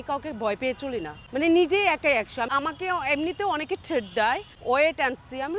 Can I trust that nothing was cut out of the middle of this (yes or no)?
no